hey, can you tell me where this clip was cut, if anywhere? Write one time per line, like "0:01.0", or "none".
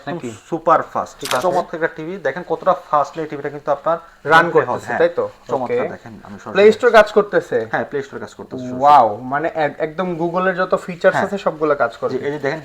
0:01.2